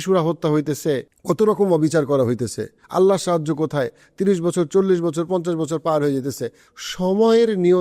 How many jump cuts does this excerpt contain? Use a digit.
2